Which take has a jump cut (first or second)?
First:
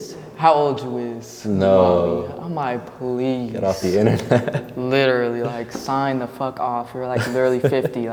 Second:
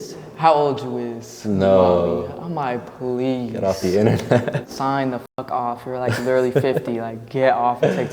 second